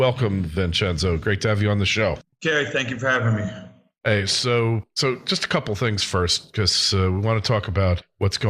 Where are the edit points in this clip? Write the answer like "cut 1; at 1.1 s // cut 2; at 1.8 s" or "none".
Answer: cut 1; at 3.9 s